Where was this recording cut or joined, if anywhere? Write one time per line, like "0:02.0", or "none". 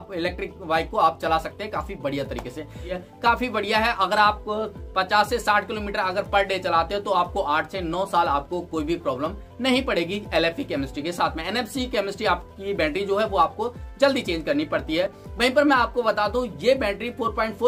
none